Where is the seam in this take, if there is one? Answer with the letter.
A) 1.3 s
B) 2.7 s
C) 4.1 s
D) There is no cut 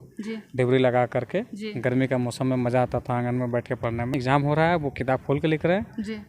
C